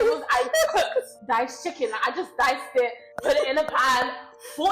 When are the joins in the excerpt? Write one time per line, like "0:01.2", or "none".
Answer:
0:01.2
0:03.1